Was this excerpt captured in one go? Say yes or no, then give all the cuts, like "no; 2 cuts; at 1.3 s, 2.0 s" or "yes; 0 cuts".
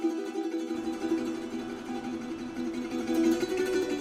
yes; 0 cuts